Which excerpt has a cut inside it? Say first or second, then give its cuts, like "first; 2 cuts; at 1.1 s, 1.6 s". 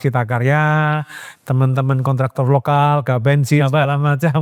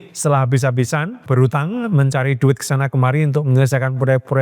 second; 1 cut; at 1.3 s